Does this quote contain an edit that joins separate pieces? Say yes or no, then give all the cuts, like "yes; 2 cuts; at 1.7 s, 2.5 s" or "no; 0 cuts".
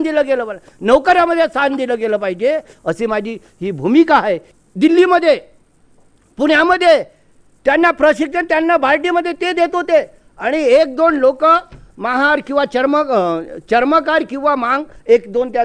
yes; 1 cut; at 4.5 s